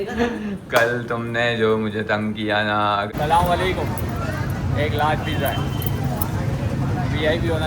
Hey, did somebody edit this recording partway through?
yes; 1 cut; at 3.1 s

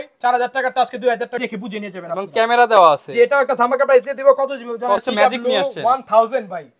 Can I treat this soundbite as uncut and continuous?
no; 2 cuts; at 1.4 s, 5.0 s

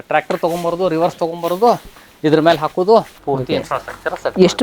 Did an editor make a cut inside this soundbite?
yes; 1 cut; at 3.1 s

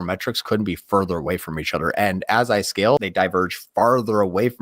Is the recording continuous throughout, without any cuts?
no; 1 cut; at 3.0 s

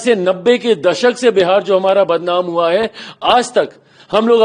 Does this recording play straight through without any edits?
yes; 0 cuts

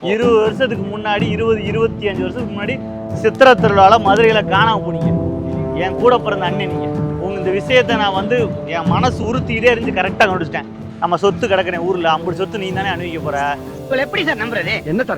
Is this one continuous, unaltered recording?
no; 1 cut; at 10.9 s

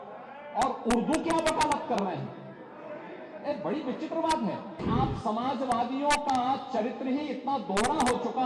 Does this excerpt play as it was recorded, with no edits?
no; 1 cut; at 4.8 s

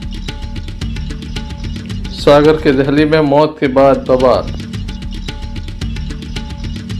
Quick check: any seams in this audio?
yes; 1 cut; at 1.0 s

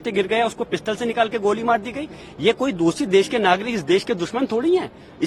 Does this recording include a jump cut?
no; 0 cuts

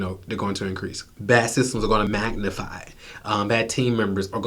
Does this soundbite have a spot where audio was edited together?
yes; 2 cuts; at 1.1 s, 2.1 s

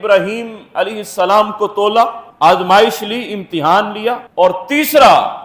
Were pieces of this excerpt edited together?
no; 0 cuts

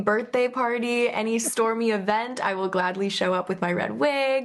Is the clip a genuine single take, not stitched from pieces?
yes; 0 cuts

